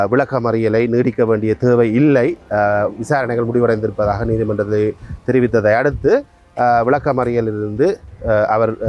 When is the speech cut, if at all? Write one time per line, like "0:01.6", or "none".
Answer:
none